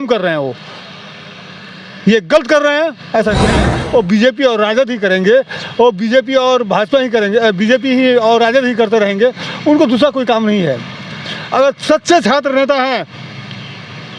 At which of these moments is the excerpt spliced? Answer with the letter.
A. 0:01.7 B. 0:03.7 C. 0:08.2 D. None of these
B